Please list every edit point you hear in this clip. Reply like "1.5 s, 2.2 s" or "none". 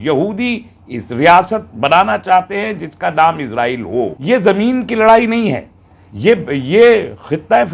4.1 s